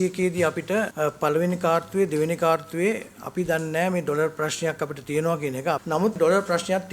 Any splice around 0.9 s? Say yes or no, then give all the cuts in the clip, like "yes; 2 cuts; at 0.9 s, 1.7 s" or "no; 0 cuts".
yes; 2 cuts; at 0.9 s, 6.2 s